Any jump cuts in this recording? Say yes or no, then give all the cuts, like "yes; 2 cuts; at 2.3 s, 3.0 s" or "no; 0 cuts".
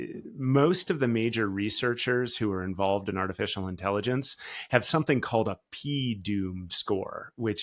no; 0 cuts